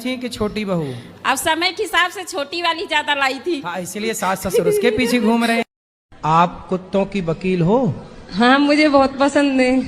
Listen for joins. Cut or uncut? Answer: cut